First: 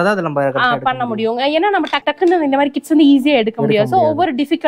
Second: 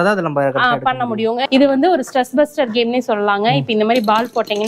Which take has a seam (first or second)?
second